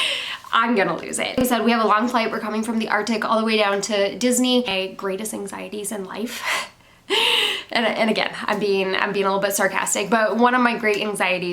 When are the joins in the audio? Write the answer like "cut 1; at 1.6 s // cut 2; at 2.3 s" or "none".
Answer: cut 1; at 1.4 s // cut 2; at 4.7 s